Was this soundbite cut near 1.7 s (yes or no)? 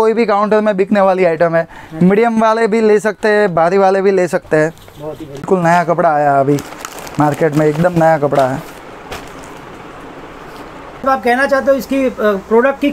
no